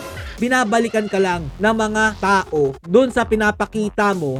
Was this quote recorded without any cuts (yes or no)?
yes